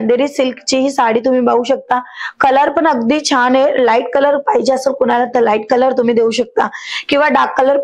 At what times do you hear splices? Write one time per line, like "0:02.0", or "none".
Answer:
none